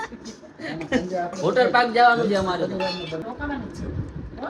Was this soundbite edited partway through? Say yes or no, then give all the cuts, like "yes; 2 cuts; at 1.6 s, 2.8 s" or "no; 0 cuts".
yes; 1 cut; at 3.2 s